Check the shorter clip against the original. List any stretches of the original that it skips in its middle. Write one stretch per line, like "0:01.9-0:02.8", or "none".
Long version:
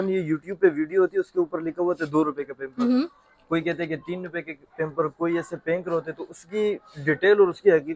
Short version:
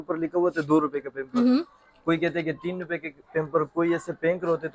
none